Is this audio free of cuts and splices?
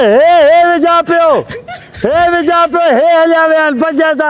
yes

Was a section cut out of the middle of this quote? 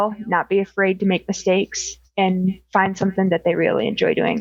no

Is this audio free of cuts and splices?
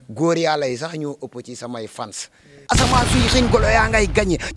no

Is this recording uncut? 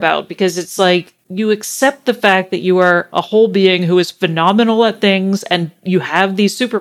no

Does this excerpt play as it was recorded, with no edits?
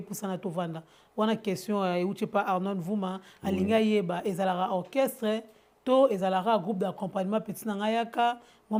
yes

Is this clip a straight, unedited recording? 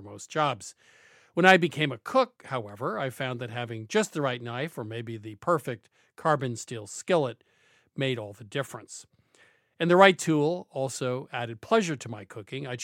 yes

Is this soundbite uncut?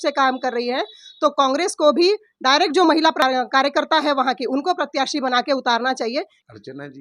yes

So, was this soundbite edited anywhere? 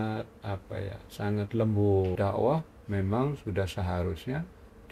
yes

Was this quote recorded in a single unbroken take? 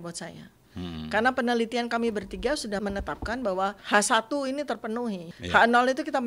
no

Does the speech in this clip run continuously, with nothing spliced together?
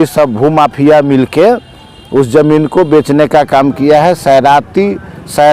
yes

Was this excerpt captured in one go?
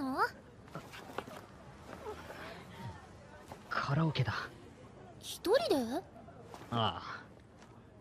yes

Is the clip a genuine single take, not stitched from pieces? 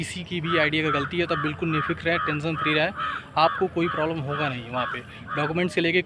yes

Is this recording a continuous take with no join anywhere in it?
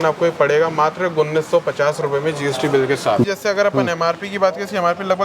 no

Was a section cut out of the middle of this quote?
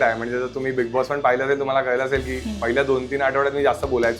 no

